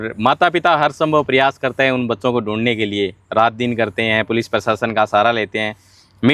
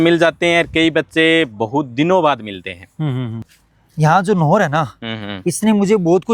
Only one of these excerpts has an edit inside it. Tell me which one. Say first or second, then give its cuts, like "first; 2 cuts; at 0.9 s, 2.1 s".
second; 1 cut; at 3.4 s